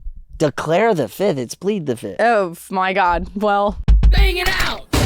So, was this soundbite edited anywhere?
yes; 1 cut; at 4.0 s

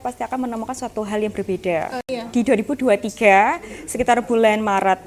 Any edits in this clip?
yes; 1 cut; at 2.1 s

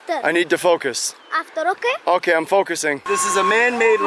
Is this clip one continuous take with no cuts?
no; 1 cut; at 3.0 s

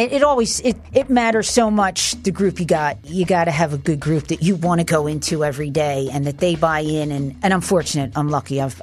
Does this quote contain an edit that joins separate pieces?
yes; 1 cut; at 3.0 s

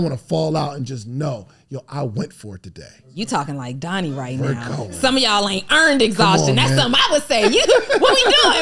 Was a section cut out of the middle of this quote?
no; 0 cuts

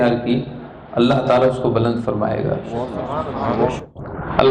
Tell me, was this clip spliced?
no; 0 cuts

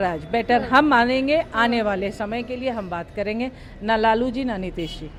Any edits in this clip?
no; 0 cuts

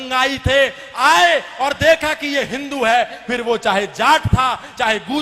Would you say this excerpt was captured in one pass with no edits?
yes; 0 cuts

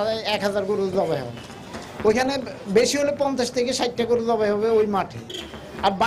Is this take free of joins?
yes; 0 cuts

